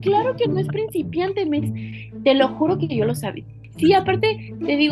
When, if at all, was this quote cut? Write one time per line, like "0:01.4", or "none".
0:03.7